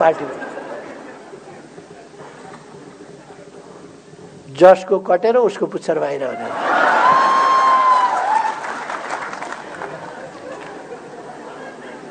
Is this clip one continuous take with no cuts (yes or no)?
yes